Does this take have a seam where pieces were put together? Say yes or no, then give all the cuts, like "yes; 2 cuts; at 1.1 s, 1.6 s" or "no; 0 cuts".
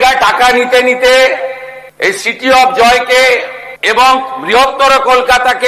no; 0 cuts